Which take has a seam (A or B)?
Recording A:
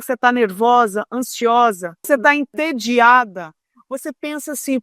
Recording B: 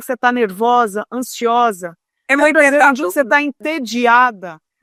A